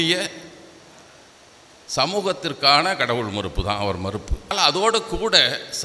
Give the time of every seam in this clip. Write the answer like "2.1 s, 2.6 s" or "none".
4.5 s